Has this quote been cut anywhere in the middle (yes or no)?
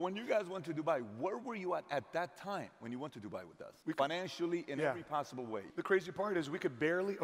yes